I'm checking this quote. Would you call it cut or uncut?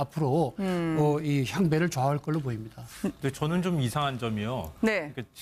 uncut